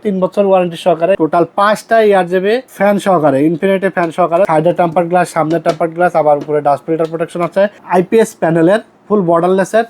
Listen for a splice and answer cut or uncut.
cut